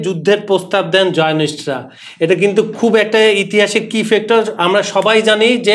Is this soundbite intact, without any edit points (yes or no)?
yes